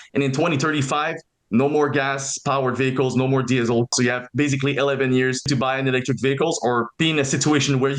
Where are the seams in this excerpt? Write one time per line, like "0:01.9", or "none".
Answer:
0:03.9
0:05.4
0:06.9